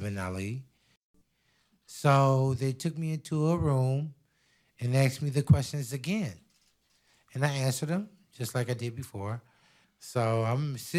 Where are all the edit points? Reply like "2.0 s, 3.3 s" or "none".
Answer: 1.1 s